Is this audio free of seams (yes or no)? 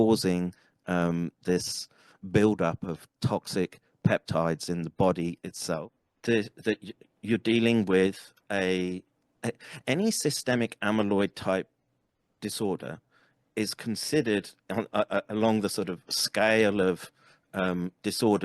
no